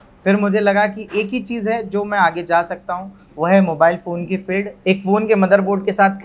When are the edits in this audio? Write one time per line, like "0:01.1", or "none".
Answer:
0:04.7

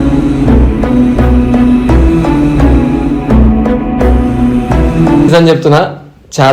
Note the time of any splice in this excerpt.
0:05.3

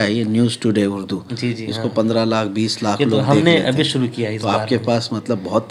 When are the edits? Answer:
none

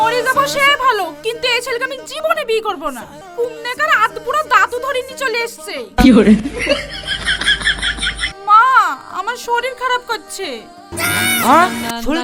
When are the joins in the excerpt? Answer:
none

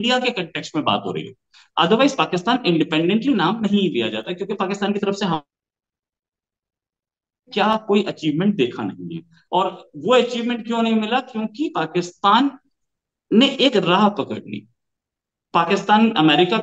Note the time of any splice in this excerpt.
none

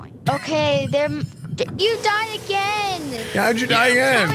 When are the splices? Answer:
0:01.7

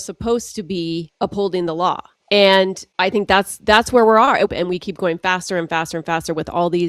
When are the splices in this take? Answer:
0:01.1
0:02.1
0:02.8
0:04.5

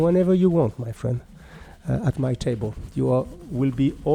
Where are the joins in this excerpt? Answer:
none

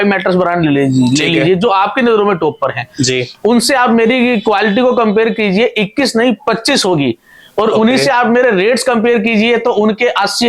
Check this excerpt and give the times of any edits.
none

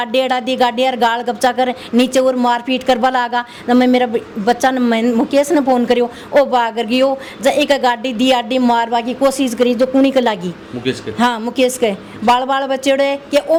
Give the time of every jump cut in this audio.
none

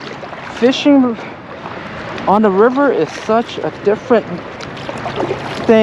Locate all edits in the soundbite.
none

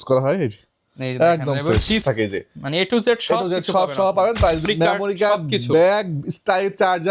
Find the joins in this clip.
0:02.0
0:04.6

